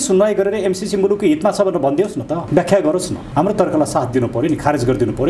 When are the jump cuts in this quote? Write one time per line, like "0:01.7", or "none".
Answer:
0:02.4
0:03.2